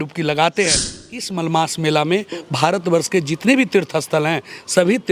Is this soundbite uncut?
no; 1 cut; at 1.0 s

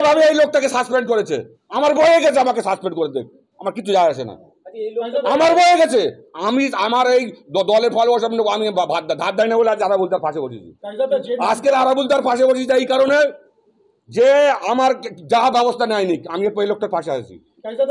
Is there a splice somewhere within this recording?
no; 0 cuts

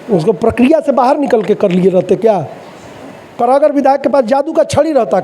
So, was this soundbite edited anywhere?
yes; 1 cut; at 3.2 s

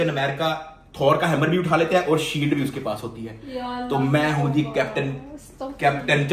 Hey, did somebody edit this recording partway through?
no; 0 cuts

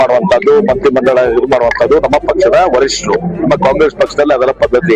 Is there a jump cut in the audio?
no; 0 cuts

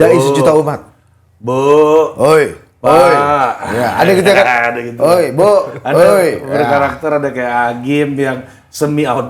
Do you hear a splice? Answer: no; 0 cuts

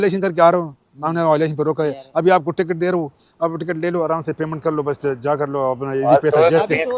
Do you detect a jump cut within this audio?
no; 0 cuts

